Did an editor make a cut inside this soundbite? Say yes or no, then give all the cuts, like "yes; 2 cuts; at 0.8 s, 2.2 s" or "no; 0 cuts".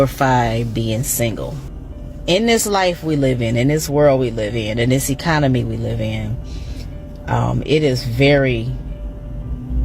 yes; 1 cut; at 1.7 s